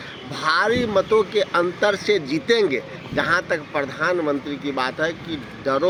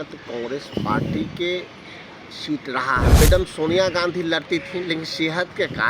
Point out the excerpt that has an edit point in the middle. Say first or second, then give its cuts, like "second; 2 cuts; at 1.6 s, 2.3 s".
second; 1 cut; at 3.2 s